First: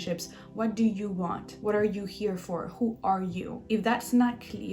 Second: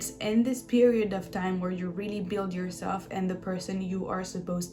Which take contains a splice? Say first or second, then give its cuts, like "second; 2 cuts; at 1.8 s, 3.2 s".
first; 2 cuts; at 1.5 s, 3.5 s